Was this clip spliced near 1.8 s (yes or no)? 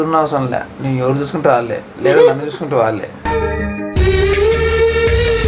no